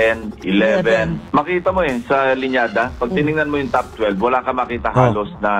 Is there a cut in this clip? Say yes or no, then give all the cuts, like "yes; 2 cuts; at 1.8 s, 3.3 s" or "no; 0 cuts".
yes; 1 cut; at 1.2 s